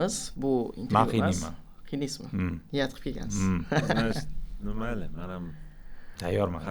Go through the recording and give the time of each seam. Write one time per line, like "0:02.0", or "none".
none